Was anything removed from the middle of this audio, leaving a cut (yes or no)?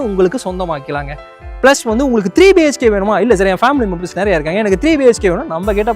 yes